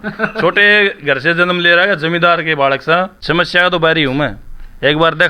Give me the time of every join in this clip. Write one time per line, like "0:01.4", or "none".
0:03.2